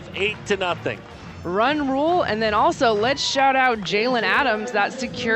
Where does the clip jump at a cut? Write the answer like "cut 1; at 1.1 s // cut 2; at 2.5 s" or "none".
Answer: cut 1; at 1.0 s